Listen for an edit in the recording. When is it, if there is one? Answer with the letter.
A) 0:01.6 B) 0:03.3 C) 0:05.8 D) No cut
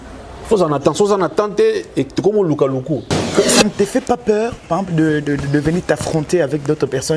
B